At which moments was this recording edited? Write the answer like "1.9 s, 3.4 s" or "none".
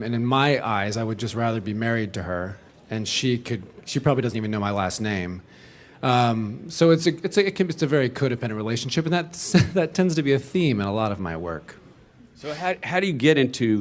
10.4 s